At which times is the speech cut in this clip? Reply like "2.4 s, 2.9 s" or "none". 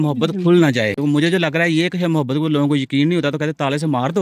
0.9 s